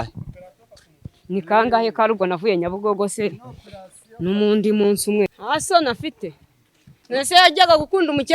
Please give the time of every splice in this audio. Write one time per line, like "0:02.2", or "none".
0:05.3